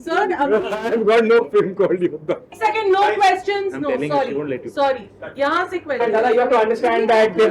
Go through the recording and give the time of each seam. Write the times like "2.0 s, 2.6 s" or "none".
2.5 s, 6.0 s

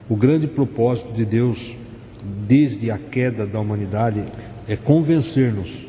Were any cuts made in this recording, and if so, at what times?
4.4 s

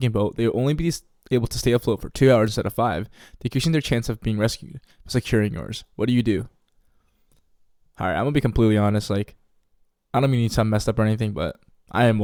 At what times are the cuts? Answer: none

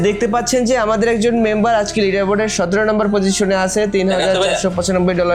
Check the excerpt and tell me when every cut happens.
none

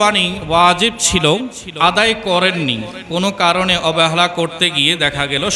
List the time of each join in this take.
1.6 s

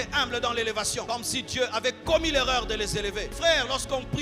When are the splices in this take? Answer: 1.1 s, 3.3 s

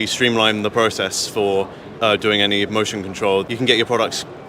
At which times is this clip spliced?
3.5 s

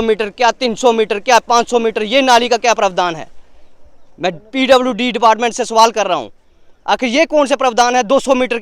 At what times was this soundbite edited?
none

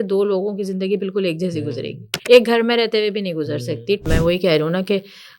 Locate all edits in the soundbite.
4.0 s

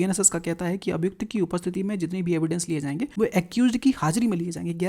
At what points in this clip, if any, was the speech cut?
3.1 s

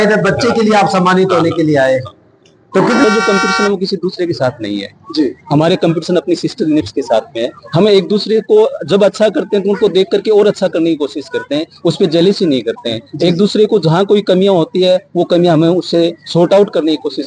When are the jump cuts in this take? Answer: 3.0 s

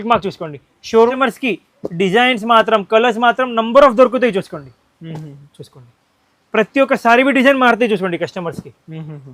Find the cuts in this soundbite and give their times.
1.1 s

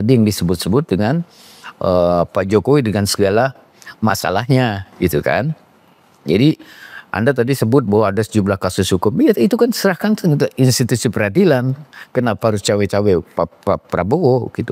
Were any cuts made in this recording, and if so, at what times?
none

